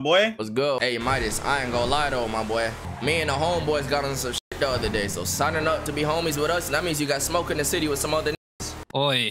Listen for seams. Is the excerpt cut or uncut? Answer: cut